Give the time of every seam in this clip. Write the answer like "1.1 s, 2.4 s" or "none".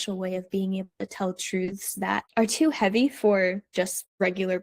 3.7 s